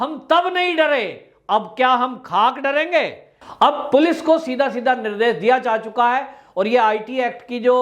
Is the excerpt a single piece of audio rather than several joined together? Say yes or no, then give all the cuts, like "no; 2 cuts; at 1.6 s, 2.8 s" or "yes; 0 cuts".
no; 1 cut; at 3.4 s